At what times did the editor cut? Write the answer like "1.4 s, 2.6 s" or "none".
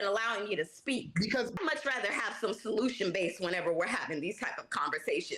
1.5 s